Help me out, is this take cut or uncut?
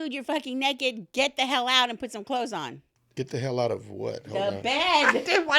uncut